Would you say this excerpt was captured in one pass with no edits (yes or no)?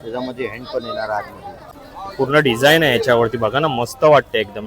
no